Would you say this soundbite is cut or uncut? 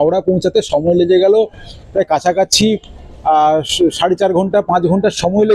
uncut